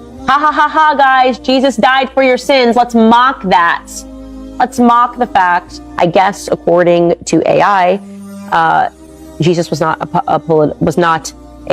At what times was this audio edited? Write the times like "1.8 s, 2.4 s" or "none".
5.8 s